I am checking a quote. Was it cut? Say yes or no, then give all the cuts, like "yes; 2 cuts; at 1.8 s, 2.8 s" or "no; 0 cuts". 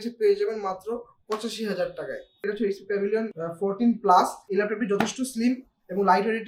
yes; 2 cuts; at 2.5 s, 4.4 s